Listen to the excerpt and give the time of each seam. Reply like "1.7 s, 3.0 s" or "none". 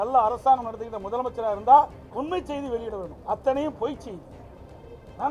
3.2 s